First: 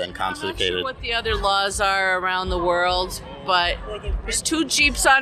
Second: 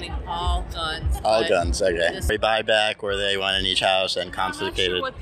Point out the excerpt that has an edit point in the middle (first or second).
second